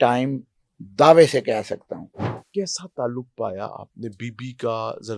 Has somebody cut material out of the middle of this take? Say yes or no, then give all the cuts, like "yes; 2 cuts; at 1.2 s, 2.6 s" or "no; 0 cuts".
yes; 1 cut; at 2.3 s